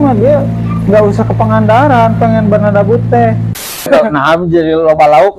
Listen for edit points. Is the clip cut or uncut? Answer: cut